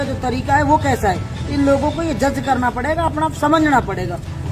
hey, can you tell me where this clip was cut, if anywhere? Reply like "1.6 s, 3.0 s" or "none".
none